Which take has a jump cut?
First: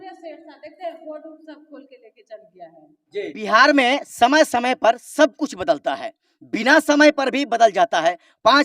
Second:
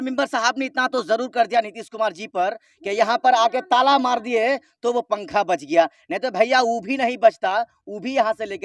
first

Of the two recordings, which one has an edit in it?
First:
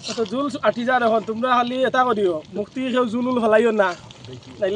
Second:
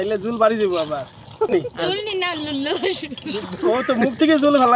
second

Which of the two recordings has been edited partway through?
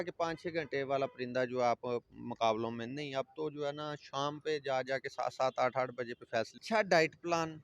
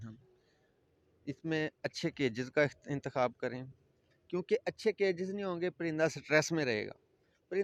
first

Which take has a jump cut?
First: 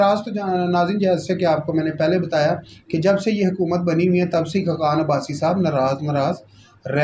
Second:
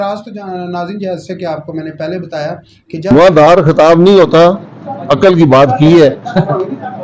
second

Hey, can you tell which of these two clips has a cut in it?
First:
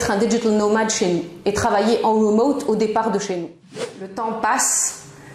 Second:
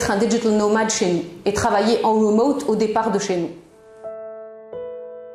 first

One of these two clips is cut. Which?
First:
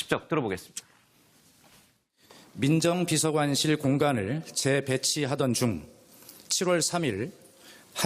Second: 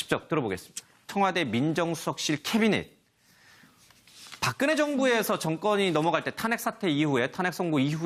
first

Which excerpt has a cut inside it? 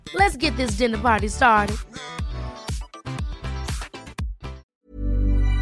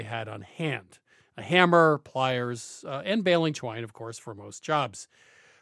first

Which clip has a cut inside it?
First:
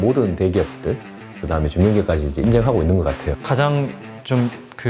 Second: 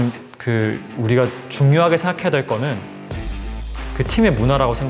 first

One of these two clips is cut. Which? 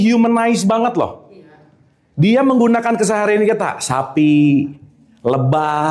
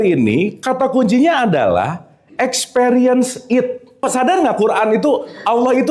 second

